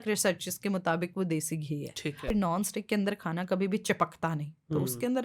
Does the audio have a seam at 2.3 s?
yes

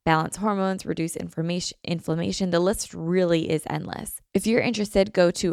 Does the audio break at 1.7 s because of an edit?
no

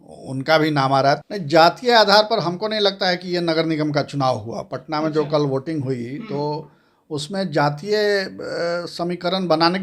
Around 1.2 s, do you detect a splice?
yes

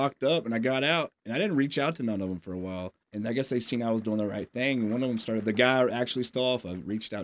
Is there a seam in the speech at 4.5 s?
no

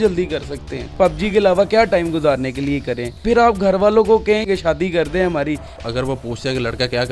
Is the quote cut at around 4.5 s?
yes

